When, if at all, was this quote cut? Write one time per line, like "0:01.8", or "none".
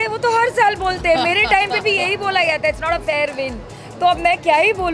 none